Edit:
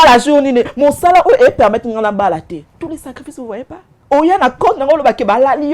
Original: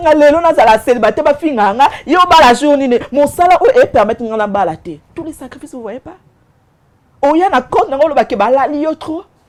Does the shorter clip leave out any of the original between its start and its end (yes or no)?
yes